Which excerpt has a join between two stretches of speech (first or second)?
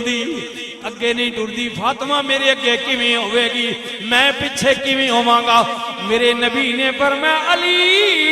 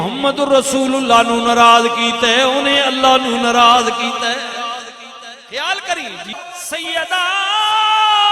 second